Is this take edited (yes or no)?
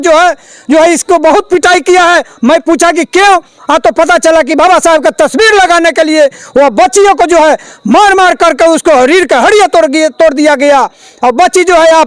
no